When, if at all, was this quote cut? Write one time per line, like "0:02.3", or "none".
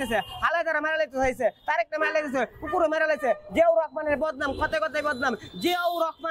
none